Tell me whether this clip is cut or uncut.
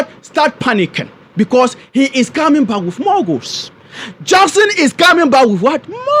uncut